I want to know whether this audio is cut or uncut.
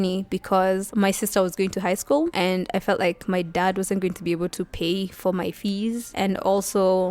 uncut